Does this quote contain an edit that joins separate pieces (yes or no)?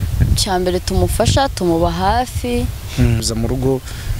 yes